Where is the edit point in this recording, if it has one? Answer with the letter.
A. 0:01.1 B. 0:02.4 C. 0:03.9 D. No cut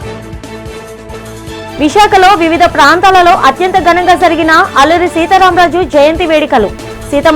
A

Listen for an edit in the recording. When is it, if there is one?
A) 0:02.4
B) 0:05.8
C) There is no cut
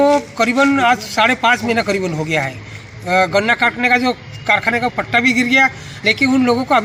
C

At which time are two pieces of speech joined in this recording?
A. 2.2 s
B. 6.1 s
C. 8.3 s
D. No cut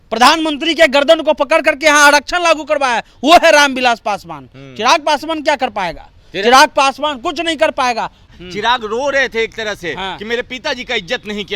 C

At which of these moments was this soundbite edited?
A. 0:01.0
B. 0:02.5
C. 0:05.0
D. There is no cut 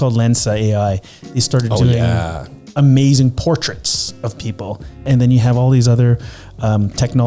C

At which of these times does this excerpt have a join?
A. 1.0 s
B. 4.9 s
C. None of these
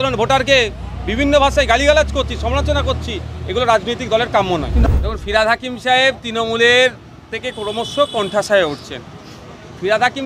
B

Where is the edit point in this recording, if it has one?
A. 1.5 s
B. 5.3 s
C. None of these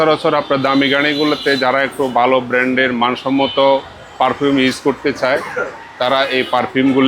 C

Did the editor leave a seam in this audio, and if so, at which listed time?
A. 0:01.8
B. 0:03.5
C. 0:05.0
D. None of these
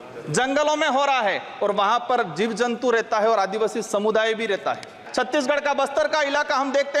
C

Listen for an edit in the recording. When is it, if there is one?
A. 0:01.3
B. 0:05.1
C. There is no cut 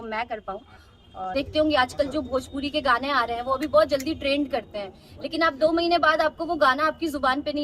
A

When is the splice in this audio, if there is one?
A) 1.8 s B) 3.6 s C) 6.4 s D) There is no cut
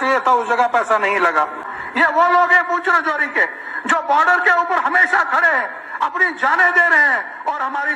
A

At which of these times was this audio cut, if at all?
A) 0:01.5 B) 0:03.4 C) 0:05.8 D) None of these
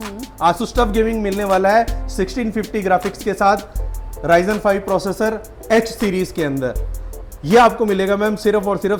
D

